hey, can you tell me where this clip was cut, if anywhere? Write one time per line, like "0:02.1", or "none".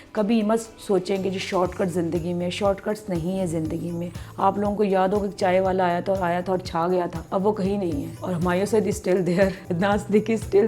0:07.2
0:08.1
0:09.6